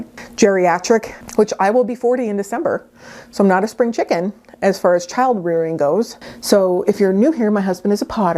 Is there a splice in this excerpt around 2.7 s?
no; 1 cut; at 6.2 s

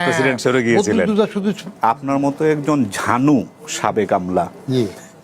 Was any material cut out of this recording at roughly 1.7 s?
yes; 1 cut; at 1.7 s

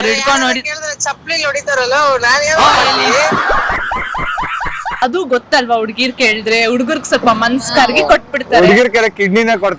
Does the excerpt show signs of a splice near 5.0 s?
yes; 1 cut; at 5.0 s

